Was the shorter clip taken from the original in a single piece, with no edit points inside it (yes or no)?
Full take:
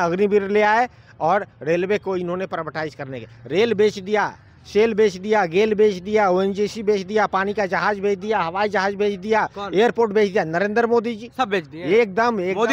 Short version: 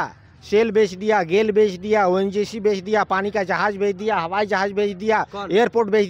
yes